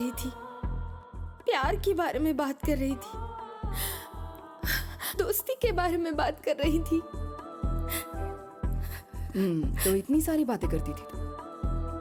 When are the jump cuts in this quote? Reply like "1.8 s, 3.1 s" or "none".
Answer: none